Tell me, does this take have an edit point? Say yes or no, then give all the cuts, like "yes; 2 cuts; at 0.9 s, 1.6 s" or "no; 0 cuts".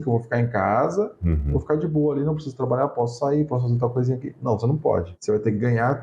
no; 0 cuts